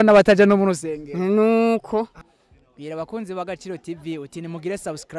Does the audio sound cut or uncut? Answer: cut